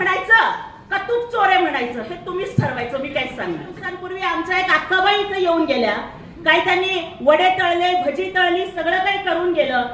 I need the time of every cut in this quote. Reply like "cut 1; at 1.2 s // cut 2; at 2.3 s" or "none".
cut 1; at 4.0 s